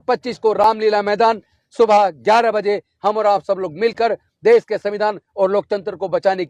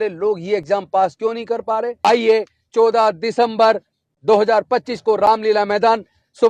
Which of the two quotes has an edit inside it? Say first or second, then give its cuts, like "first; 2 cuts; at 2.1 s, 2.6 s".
second; 1 cut; at 1.9 s